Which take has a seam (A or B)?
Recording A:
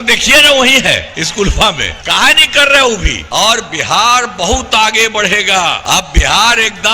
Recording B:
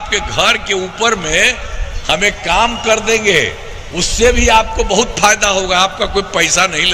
A